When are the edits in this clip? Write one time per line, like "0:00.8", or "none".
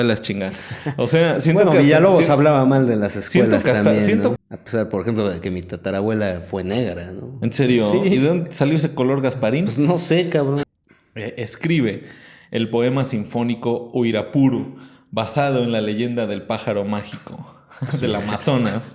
0:04.4
0:10.7